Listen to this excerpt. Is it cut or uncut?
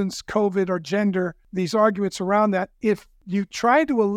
cut